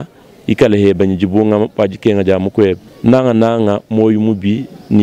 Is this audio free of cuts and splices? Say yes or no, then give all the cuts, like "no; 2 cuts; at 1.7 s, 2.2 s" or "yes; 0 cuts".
no; 1 cut; at 2.9 s